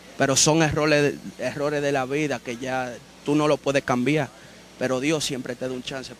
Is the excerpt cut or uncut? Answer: uncut